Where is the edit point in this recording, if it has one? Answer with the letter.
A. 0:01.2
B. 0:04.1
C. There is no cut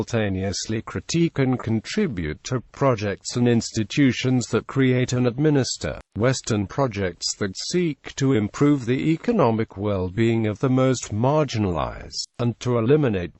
A